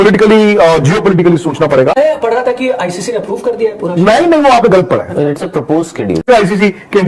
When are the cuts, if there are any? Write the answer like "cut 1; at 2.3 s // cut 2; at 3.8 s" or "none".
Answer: cut 1; at 2.0 s // cut 2; at 6.3 s